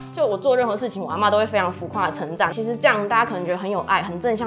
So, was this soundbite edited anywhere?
yes; 1 cut; at 2.5 s

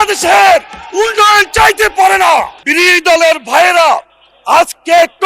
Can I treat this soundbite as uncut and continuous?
no; 1 cut; at 2.6 s

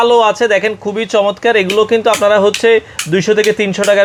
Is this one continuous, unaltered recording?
yes; 0 cuts

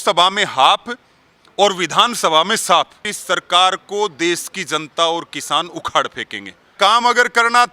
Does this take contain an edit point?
yes; 2 cuts; at 3.1 s, 6.7 s

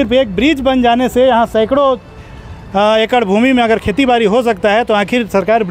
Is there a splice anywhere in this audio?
no; 0 cuts

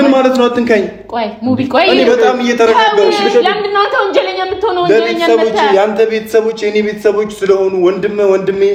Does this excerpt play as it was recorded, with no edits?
yes; 0 cuts

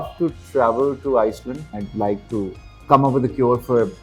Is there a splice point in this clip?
yes; 2 cuts; at 1.8 s, 2.7 s

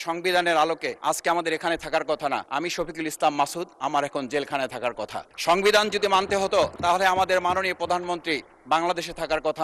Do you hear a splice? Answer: yes; 4 cuts; at 0.9 s, 2.5 s, 5.2 s, 6.8 s

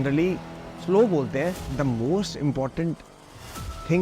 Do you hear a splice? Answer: yes; 1 cut; at 1.7 s

